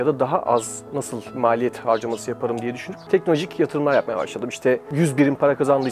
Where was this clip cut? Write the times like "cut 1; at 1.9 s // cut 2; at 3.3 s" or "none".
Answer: cut 1; at 1.3 s // cut 2; at 2.9 s // cut 3; at 4.9 s